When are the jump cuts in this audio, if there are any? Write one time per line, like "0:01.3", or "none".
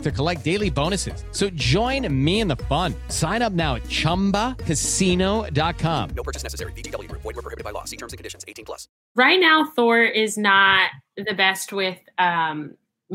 0:09.1